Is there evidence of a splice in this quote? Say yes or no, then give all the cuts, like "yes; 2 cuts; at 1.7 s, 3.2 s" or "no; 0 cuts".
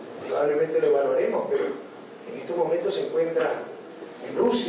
yes; 1 cut; at 3.4 s